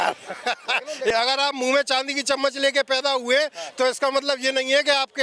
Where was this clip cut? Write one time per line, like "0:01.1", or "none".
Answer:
0:01.1